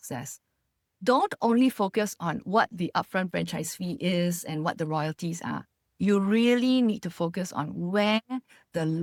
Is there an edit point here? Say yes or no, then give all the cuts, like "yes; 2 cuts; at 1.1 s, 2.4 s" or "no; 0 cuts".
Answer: no; 0 cuts